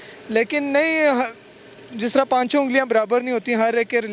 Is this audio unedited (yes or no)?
yes